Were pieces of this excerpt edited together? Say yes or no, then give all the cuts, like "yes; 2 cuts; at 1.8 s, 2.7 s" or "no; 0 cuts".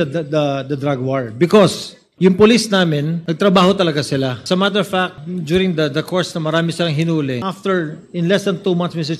yes; 5 cuts; at 2.0 s, 3.2 s, 4.4 s, 5.3 s, 7.5 s